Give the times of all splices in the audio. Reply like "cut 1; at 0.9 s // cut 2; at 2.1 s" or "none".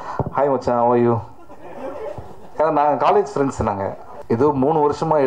cut 1; at 4.1 s